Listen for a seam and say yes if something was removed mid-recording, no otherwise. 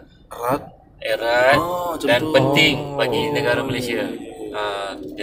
no